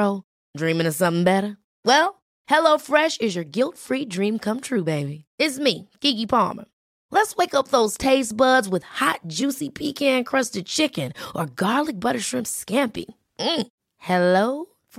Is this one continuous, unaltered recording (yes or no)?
yes